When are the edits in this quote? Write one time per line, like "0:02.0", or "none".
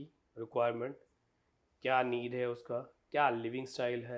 none